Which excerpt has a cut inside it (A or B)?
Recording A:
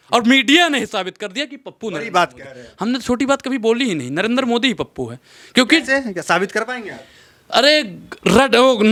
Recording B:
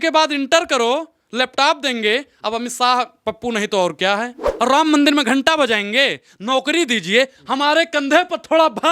B